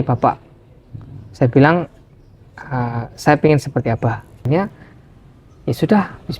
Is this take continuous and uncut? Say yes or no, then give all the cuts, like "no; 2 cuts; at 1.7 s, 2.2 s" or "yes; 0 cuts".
no; 1 cut; at 4.5 s